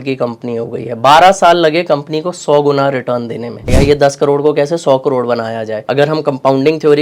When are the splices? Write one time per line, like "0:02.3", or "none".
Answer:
0:03.7
0:05.7